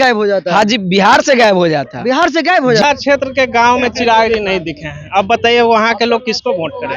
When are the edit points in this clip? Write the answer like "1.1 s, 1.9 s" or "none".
2.8 s

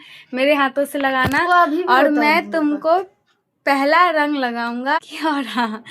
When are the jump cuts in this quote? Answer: 5.0 s

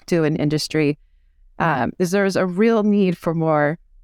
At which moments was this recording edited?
none

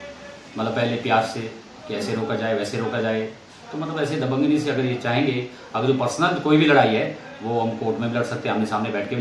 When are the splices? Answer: none

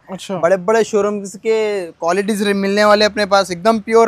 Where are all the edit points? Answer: none

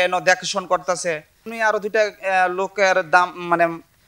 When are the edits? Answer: 1.5 s

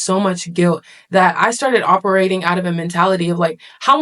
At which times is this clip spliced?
none

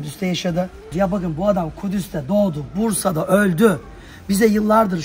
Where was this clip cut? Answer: 0.9 s

